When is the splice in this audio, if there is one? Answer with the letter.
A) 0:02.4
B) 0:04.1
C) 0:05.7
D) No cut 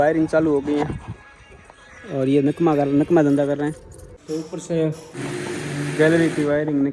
B